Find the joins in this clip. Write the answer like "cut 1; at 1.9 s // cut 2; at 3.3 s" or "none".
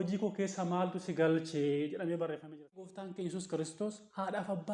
cut 1; at 2.9 s